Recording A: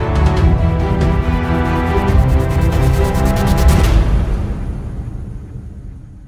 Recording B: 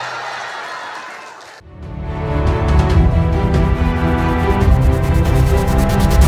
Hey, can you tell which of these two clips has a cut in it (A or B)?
B